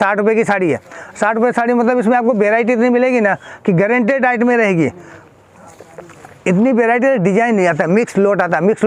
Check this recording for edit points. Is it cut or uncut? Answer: uncut